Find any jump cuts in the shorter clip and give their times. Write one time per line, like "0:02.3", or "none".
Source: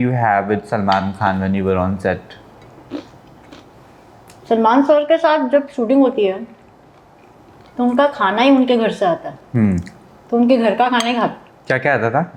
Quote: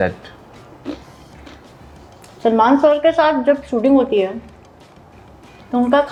none